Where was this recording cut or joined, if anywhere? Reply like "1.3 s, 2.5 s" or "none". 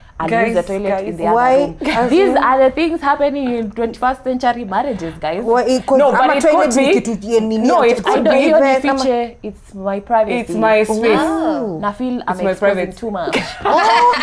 none